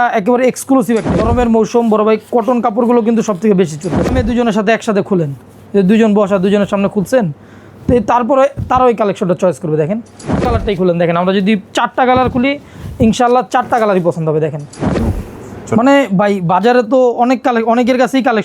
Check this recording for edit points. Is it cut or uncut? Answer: cut